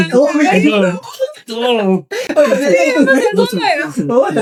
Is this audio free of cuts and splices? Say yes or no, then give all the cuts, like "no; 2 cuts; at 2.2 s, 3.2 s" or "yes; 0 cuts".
yes; 0 cuts